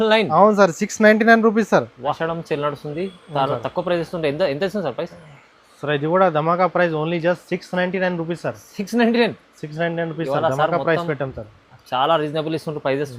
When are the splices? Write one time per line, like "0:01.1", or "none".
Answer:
0:02.2

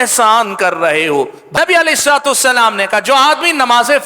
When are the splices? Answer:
0:01.4

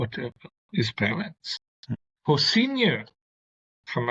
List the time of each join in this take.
0:01.9

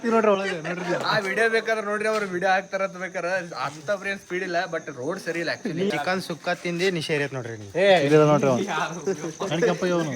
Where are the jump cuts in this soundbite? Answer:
0:05.9

